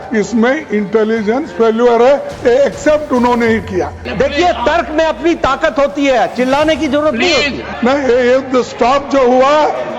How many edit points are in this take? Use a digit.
2